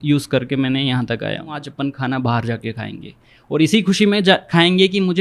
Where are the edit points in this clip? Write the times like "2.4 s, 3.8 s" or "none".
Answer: 1.6 s